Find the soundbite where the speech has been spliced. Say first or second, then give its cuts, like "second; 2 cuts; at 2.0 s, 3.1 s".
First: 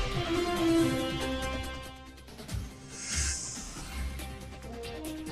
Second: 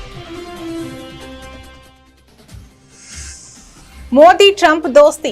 first; 1 cut; at 3.9 s